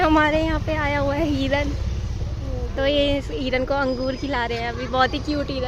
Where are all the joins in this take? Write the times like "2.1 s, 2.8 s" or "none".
none